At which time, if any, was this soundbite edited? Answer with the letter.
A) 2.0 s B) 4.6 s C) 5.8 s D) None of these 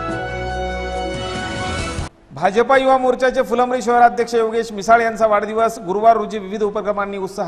A